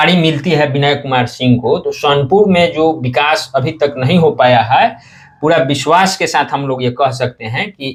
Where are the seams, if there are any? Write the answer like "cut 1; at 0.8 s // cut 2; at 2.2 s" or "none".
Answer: none

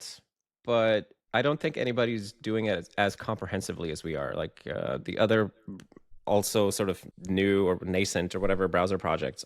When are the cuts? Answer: cut 1; at 1.2 s // cut 2; at 7.1 s

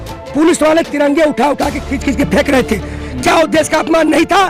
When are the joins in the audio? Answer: none

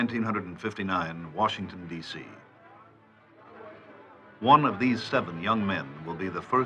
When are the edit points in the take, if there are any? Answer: none

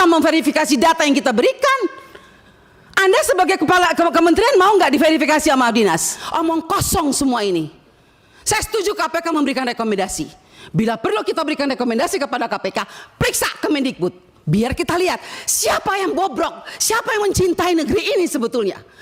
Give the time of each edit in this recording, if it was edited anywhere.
cut 1; at 6.2 s

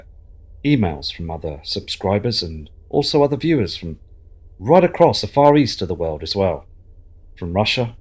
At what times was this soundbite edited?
cut 1; at 5.7 s

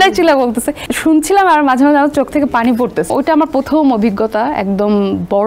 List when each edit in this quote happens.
cut 1; at 0.9 s // cut 2; at 3.1 s

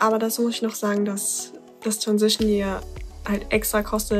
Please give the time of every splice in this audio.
none

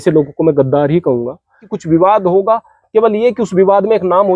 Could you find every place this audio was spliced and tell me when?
cut 1; at 1.7 s

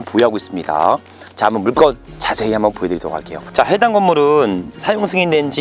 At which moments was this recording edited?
cut 1; at 3.5 s

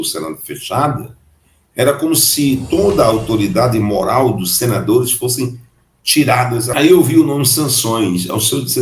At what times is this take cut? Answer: cut 1; at 6.7 s

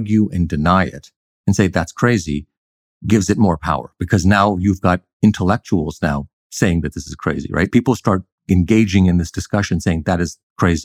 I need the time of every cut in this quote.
cut 1; at 6.4 s

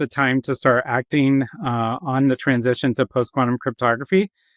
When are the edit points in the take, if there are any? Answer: none

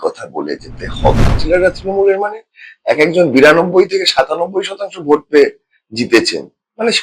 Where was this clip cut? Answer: cut 1; at 1.4 s

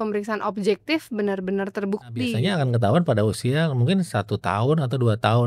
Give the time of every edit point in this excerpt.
cut 1; at 2.4 s

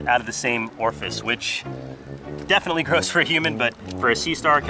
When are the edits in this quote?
cut 1; at 2.2 s

